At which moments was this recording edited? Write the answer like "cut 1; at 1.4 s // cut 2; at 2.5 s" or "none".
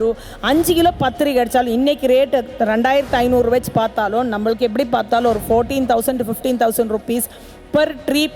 none